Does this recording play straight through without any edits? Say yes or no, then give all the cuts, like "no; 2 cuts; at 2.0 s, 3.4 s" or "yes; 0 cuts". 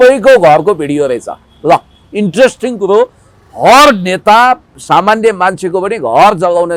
yes; 0 cuts